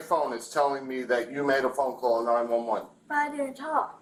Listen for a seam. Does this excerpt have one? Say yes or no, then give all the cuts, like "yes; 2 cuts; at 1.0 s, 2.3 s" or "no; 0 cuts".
no; 0 cuts